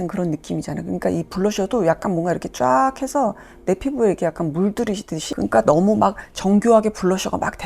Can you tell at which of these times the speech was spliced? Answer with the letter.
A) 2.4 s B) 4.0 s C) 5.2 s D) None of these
C